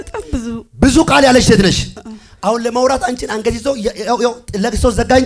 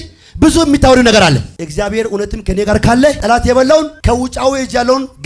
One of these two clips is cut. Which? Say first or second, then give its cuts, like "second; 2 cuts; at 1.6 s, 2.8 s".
second; 3 cuts; at 1.6 s, 3.2 s, 4.0 s